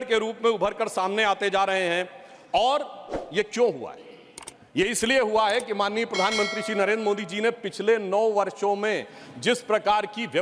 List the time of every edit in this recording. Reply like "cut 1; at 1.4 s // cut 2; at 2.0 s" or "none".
none